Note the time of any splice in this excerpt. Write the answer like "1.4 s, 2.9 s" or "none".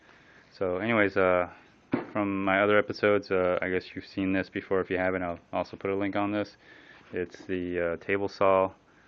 none

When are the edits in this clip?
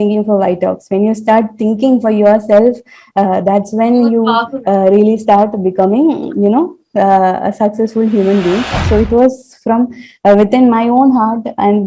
8.8 s

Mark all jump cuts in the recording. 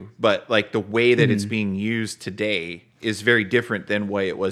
2.8 s

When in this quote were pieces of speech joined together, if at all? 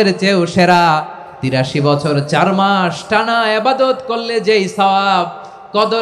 1.6 s

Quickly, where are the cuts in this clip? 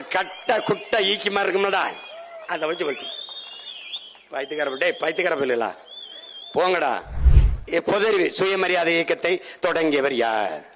7.2 s

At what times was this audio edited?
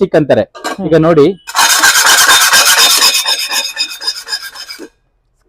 none

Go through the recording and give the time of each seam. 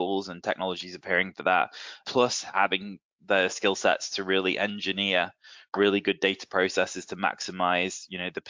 2.0 s

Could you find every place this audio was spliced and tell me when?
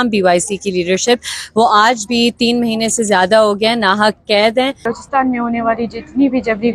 4.9 s

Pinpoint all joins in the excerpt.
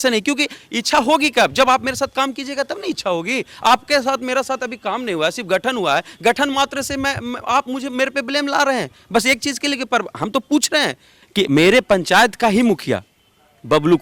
11.1 s

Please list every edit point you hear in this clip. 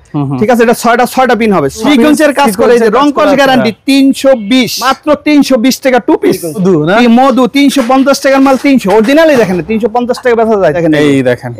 1.9 s, 4.9 s, 6.6 s, 10.8 s

